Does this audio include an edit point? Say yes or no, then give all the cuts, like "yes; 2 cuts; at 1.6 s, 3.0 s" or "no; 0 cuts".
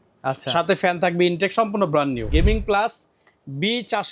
yes; 1 cut; at 2.3 s